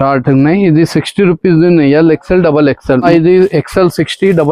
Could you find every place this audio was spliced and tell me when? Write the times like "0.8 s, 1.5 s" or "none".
3.1 s